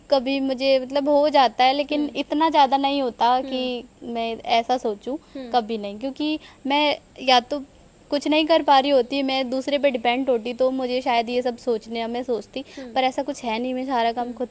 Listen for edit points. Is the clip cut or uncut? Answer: uncut